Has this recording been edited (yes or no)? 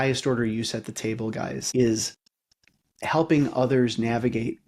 yes